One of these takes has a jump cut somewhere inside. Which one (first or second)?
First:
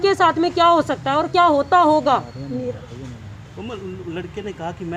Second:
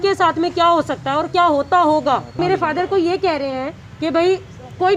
second